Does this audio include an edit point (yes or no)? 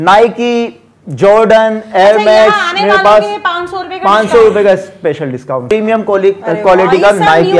yes